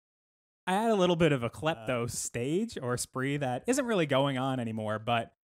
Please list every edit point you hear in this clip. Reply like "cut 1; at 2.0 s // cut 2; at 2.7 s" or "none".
cut 1; at 2.2 s